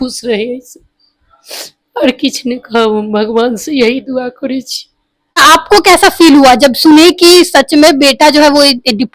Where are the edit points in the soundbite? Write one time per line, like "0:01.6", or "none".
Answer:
0:05.4